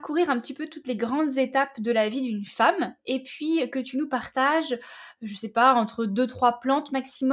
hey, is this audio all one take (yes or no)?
yes